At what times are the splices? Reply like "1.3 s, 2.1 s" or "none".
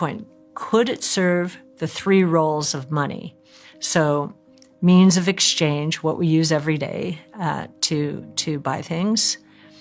none